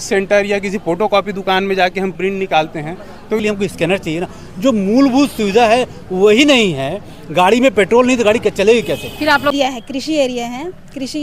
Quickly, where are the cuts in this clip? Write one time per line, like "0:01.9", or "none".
0:03.4
0:09.5